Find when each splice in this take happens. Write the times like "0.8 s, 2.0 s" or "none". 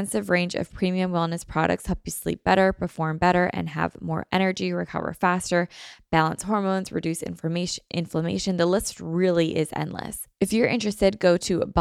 10.2 s

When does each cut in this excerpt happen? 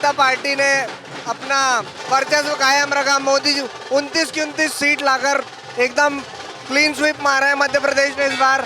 2.0 s

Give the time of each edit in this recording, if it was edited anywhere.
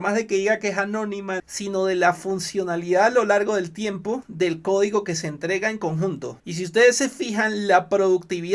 1.5 s, 4.3 s, 6.4 s

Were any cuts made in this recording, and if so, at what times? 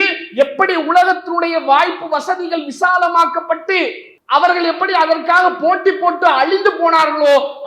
4.1 s

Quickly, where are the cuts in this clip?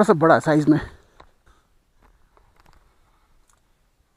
1.5 s

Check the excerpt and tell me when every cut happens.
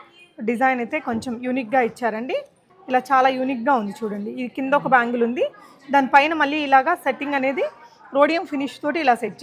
2.7 s

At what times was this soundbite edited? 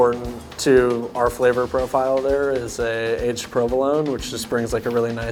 none

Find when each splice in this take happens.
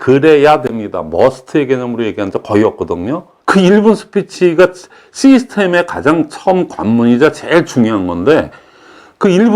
3.4 s

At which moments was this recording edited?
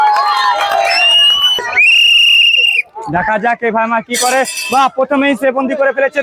1.7 s

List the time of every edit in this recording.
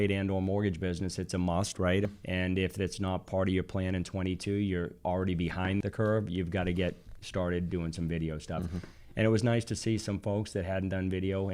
2.1 s, 5.8 s

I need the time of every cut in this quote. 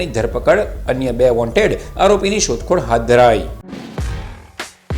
3.5 s

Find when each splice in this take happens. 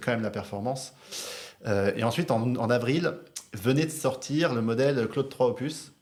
none

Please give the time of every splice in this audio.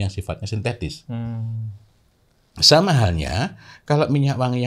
none

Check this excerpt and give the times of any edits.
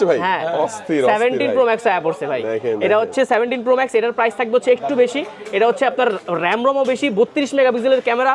none

